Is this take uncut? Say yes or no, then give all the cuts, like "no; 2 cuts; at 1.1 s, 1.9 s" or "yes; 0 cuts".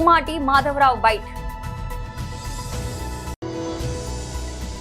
no; 1 cut; at 1.2 s